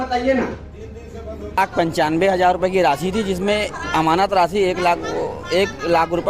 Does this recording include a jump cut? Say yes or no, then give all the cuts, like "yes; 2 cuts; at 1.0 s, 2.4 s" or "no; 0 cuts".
yes; 1 cut; at 1.6 s